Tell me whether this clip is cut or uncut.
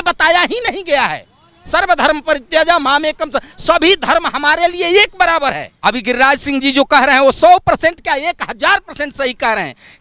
cut